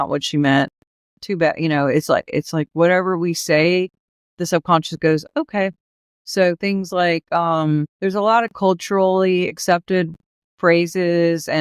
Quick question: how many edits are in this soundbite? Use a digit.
1